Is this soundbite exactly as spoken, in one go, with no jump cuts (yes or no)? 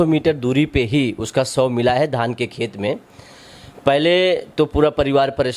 yes